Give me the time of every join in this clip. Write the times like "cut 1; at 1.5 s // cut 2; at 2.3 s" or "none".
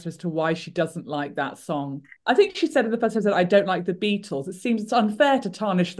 none